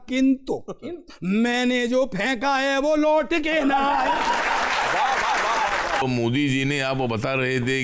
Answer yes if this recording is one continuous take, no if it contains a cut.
no